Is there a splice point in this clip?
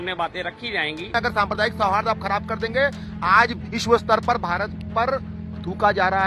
yes; 1 cut; at 1.1 s

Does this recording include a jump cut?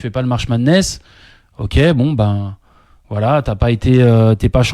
yes; 1 cut; at 3.8 s

